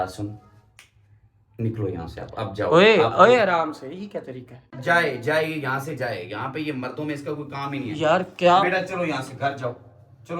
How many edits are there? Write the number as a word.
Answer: one